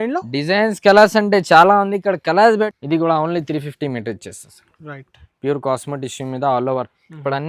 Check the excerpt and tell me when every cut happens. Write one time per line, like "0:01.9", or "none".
0:02.7